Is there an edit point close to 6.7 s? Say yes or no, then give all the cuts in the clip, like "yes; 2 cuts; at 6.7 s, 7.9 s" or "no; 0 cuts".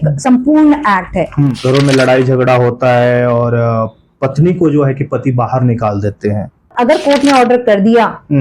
yes; 2 cuts; at 1.5 s, 6.7 s